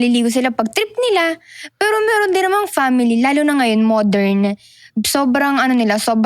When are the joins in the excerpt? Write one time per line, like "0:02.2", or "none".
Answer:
none